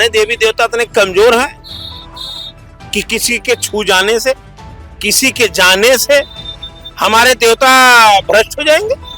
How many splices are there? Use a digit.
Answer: 0